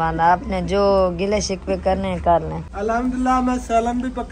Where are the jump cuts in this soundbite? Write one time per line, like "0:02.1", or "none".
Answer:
0:02.6